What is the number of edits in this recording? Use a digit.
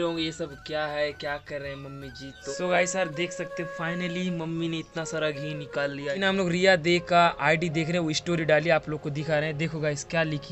2